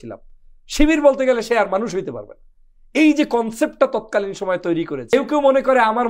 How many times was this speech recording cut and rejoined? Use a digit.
1